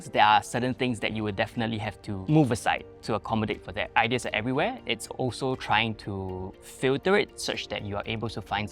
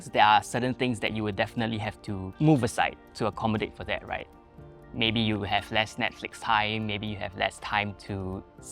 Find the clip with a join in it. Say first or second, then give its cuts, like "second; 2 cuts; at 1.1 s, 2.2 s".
first; 2 cuts; at 2.2 s, 3.9 s